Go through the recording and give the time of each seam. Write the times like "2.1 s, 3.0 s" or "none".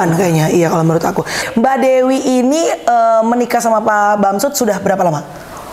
1.4 s